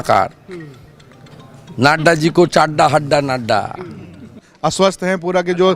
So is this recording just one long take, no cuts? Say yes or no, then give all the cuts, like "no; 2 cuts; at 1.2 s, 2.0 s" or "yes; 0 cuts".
no; 1 cut; at 4.5 s